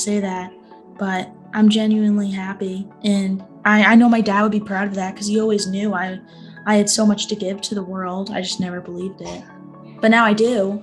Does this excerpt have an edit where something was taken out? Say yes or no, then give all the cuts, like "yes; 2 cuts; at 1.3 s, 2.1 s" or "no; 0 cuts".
no; 0 cuts